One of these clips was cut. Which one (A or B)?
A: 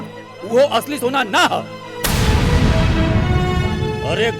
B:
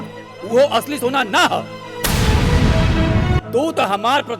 B